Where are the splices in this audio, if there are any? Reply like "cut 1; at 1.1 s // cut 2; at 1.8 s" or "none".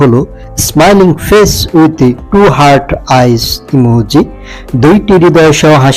none

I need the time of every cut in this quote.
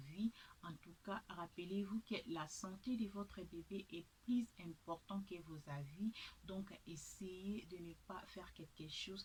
none

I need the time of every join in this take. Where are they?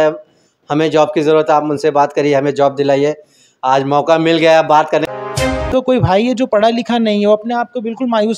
cut 1; at 5.1 s

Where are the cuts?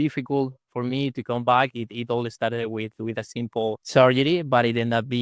cut 1; at 3.8 s

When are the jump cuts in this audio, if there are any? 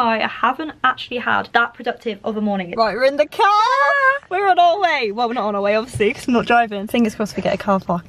cut 1; at 1.5 s // cut 2; at 2.7 s // cut 3; at 6.8 s

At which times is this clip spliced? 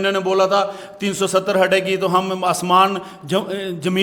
none

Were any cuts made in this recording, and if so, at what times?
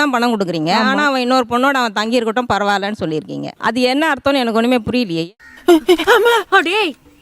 none

